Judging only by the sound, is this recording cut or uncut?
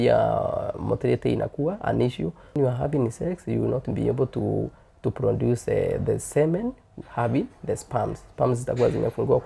cut